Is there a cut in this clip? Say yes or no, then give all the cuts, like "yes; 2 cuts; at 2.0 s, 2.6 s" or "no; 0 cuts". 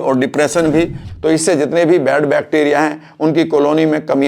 yes; 1 cut; at 1.0 s